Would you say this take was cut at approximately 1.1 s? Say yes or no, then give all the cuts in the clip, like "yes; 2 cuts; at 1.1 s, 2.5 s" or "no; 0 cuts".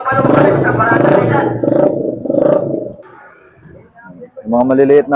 no; 1 cut; at 3.0 s